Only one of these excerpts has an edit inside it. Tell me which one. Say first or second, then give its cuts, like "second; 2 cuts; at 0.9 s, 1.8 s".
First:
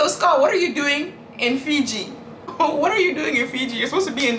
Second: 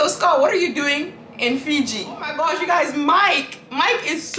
second; 1 cut; at 2.3 s